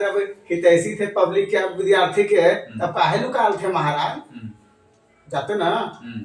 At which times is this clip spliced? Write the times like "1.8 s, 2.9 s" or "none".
none